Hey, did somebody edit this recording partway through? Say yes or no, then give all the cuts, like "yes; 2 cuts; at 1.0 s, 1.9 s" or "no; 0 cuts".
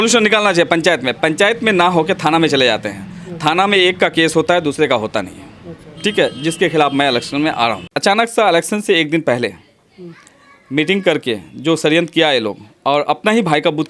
yes; 1 cut; at 7.9 s